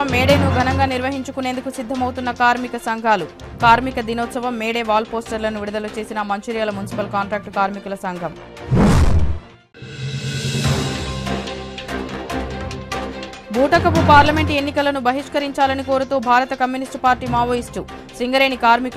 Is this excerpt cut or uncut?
uncut